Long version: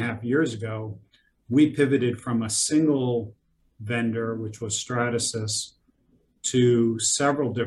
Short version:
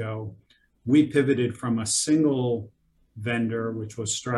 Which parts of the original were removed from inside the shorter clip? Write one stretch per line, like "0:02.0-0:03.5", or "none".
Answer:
none